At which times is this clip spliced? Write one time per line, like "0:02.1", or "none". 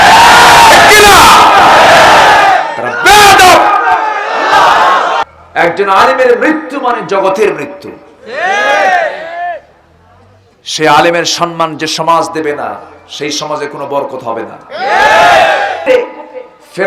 0:05.3
0:15.8